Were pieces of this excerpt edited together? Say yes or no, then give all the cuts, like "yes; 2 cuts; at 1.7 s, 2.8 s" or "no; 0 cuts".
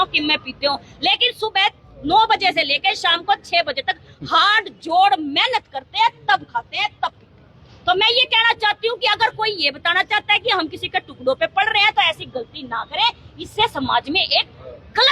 no; 0 cuts